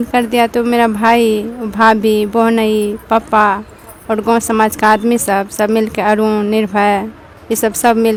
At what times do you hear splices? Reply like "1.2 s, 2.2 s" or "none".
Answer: none